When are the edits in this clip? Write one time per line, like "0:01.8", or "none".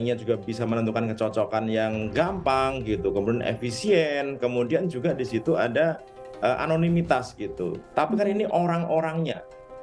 0:07.8

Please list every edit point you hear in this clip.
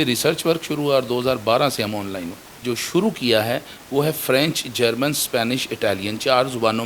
0:02.6

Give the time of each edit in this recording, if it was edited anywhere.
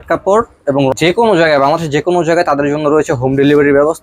0:00.9

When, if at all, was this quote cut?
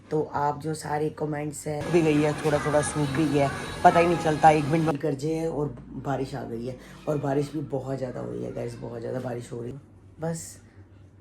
0:01.9
0:04.9
0:09.7

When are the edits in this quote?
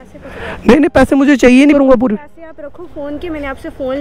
0:01.8

